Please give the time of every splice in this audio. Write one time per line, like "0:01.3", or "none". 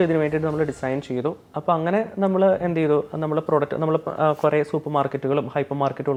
none